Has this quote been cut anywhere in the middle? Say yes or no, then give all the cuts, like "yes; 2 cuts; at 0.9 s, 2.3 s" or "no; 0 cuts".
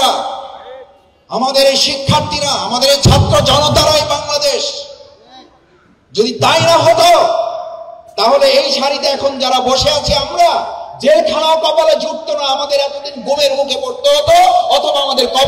no; 0 cuts